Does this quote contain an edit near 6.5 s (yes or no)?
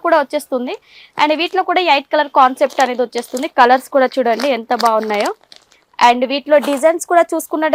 no